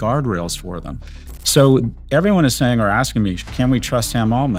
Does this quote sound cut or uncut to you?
uncut